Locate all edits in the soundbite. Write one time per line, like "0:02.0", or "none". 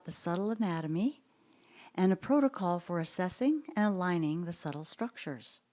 none

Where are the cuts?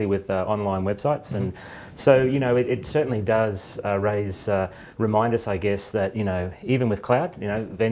none

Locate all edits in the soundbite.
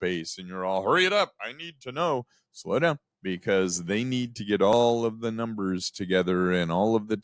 0:03.1
0:04.7

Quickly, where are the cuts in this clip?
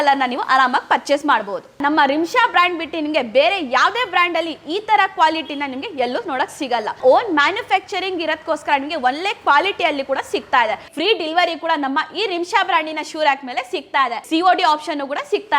0:01.8
0:07.0
0:10.9
0:14.2

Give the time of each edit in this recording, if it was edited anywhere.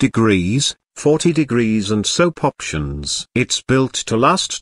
0:02.7

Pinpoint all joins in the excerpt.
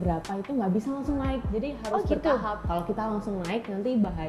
0:02.6

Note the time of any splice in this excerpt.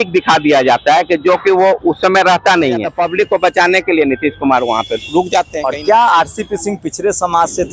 0:02.9
0:05.6

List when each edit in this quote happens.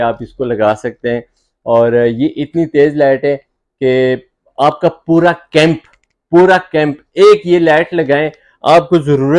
none

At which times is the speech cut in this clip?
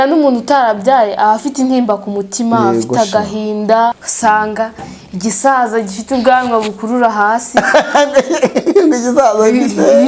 0:04.0

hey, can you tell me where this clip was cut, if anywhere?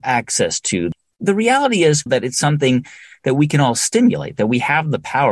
0:02.1

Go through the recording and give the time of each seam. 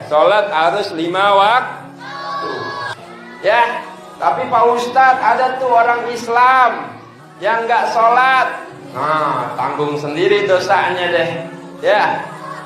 0:02.8

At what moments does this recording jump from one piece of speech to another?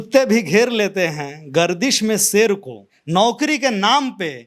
0:02.9

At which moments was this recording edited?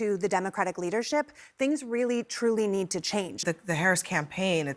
0:03.4

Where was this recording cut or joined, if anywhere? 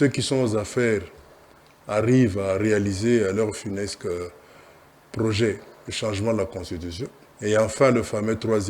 0:07.2

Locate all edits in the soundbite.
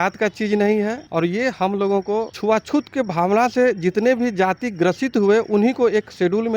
0:01.0
0:02.3

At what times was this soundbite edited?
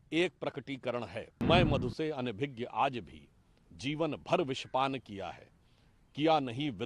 0:01.4

